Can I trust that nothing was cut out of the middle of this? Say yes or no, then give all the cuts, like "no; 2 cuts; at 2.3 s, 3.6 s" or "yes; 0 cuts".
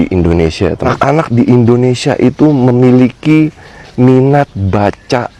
no; 1 cut; at 0.9 s